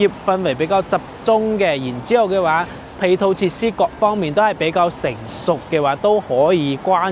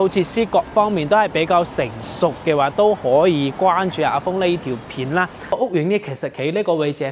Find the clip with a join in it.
second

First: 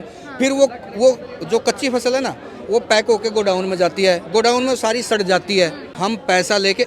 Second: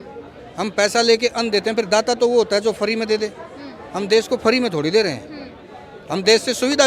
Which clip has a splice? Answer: first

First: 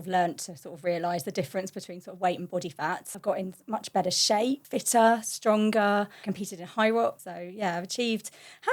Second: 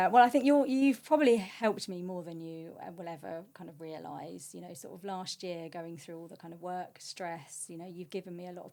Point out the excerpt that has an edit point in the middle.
first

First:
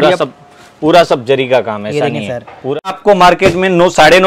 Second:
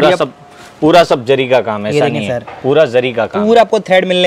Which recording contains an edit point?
first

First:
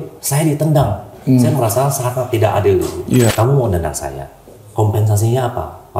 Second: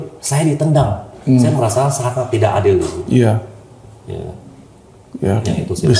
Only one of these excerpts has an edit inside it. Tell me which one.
first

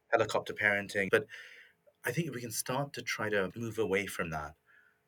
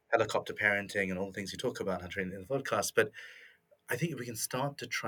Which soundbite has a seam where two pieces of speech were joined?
first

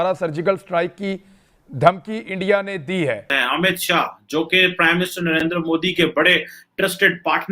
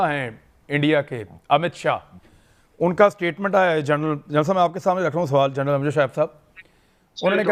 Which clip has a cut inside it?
first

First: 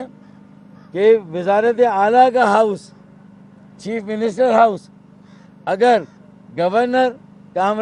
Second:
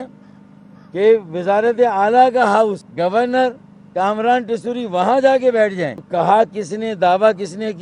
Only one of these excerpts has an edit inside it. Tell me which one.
second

